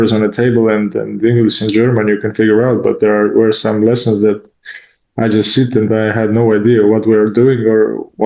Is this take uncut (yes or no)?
yes